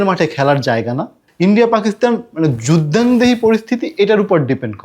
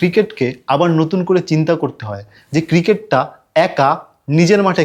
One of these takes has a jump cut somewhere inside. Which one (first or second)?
first